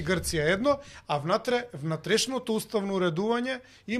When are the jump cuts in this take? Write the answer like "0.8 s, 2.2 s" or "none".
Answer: none